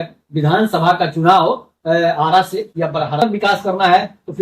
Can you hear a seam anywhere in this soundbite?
yes; 1 cut; at 3.2 s

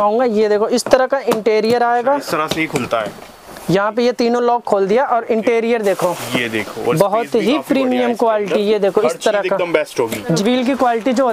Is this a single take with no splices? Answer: no; 1 cut; at 10.4 s

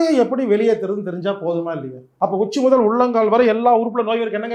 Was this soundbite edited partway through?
yes; 1 cut; at 2.0 s

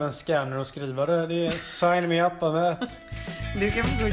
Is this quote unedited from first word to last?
yes; 0 cuts

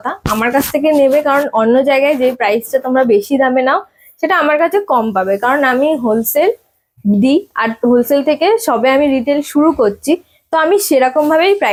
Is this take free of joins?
yes; 0 cuts

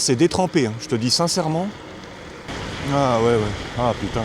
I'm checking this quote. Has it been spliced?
yes; 1 cut; at 2.5 s

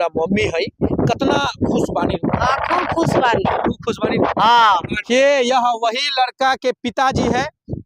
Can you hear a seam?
yes; 1 cut; at 5.1 s

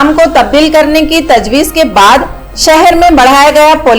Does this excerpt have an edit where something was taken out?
no; 0 cuts

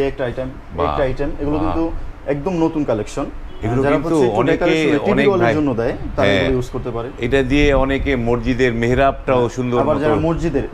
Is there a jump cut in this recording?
no; 0 cuts

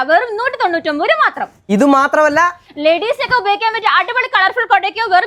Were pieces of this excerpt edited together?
no; 0 cuts

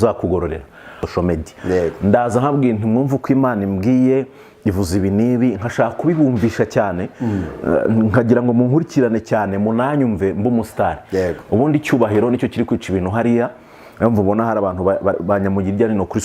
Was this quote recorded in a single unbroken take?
no; 1 cut; at 1.0 s

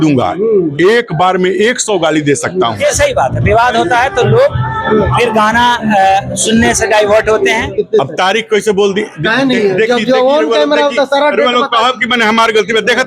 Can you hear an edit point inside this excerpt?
yes; 2 cuts; at 2.8 s, 7.7 s

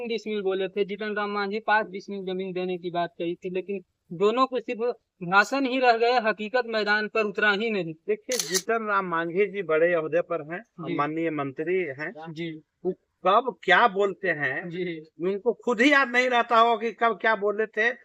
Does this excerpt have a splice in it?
no; 0 cuts

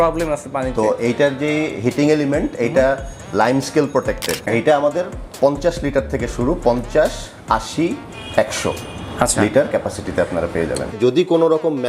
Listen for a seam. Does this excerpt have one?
yes; 2 cuts; at 4.5 s, 10.9 s

